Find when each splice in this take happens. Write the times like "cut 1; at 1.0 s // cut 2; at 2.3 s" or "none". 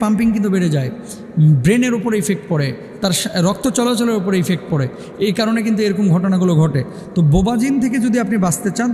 none